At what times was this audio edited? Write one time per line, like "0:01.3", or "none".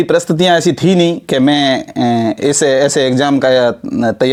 none